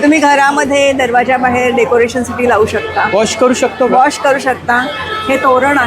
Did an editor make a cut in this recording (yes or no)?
no